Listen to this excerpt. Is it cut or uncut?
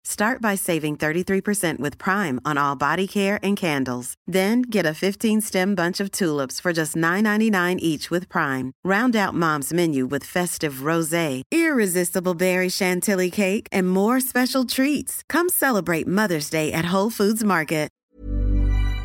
cut